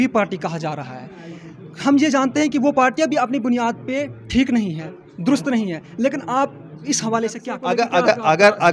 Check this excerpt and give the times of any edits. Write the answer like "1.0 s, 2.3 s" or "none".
7.5 s